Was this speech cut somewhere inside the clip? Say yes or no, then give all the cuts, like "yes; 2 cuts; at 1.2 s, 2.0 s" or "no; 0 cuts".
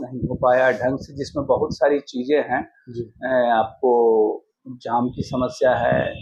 no; 0 cuts